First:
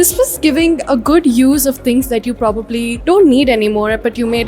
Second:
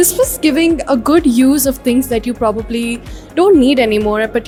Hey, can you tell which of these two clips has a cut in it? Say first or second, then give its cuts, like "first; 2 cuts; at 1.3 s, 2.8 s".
first; 1 cut; at 2.9 s